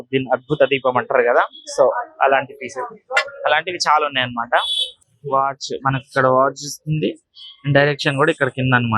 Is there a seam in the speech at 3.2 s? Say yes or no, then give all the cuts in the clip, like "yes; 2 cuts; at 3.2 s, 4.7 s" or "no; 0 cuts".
no; 1 cut; at 4.8 s